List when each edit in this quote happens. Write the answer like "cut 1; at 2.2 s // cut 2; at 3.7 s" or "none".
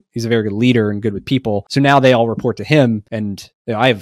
cut 1; at 1.7 s // cut 2; at 3.1 s

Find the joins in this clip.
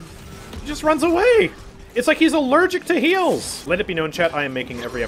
cut 1; at 3.5 s

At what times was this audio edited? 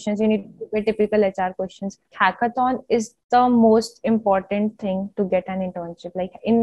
cut 1; at 2.1 s

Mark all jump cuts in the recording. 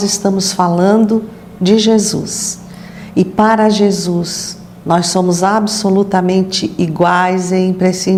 none

